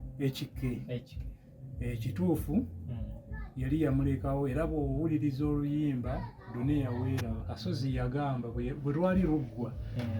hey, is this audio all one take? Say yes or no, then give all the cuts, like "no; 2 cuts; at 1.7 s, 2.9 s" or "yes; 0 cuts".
no; 1 cut; at 7.4 s